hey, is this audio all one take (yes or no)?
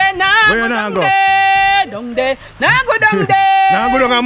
yes